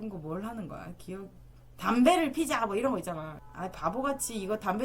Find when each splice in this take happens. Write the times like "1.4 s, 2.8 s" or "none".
3.3 s